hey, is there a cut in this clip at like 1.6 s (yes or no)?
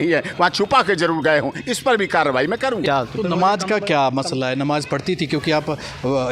no